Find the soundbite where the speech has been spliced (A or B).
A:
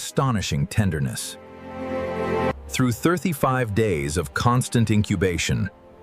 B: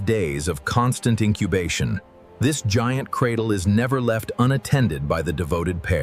A